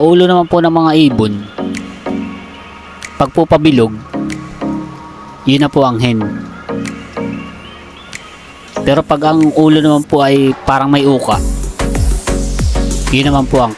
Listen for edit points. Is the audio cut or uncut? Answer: uncut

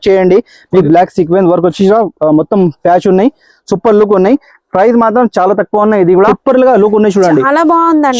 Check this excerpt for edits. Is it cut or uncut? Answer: cut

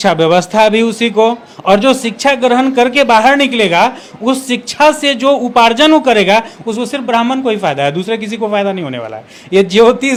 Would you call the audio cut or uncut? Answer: uncut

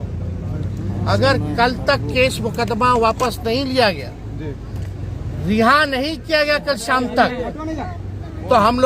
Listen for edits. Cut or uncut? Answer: uncut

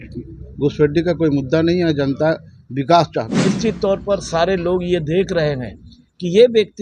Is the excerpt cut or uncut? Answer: cut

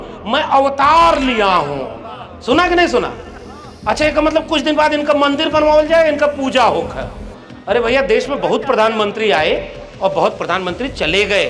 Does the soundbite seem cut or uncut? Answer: uncut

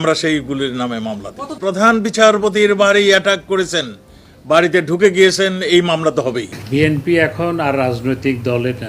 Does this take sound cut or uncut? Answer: cut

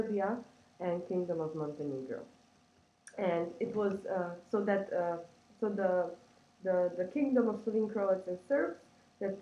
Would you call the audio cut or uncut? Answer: uncut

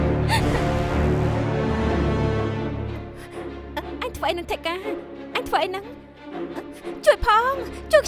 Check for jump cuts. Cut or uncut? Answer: cut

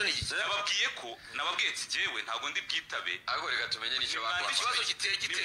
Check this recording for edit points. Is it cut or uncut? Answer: uncut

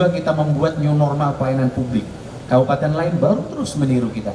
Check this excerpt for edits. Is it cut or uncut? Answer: uncut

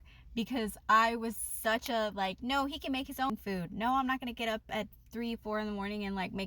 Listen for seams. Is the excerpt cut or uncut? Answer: uncut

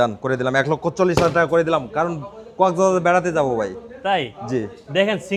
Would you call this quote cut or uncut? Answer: uncut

